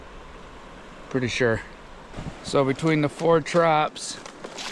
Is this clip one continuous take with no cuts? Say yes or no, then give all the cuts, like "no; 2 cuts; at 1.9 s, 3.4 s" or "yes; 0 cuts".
no; 1 cut; at 2.2 s